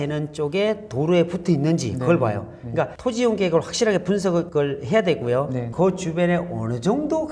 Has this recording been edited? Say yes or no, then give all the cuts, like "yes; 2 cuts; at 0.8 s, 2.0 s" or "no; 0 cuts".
yes; 1 cut; at 5.7 s